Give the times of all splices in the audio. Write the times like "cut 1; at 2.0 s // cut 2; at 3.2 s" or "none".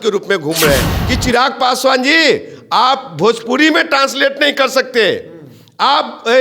cut 1; at 1.0 s